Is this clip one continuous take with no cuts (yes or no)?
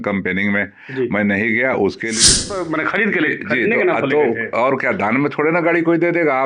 no